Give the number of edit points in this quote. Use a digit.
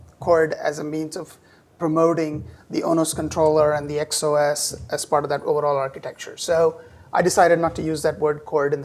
0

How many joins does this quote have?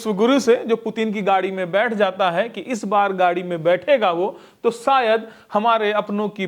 0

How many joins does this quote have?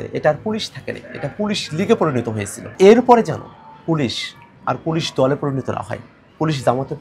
1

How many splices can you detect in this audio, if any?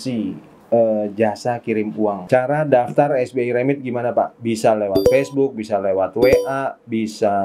1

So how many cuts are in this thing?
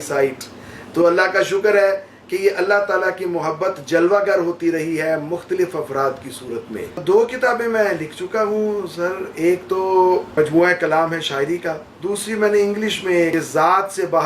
4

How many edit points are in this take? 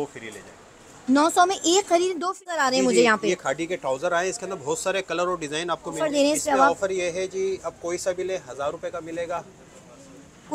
2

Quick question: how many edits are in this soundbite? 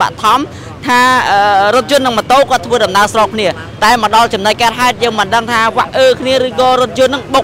0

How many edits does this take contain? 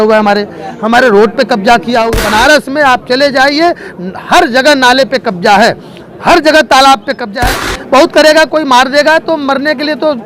2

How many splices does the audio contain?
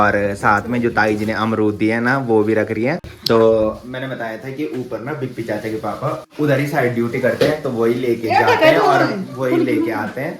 0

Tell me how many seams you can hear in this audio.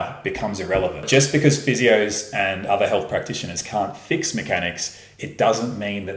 1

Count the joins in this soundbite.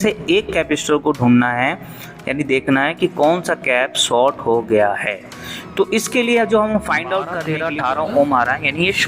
1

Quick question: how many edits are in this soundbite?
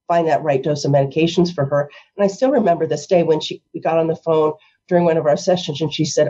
0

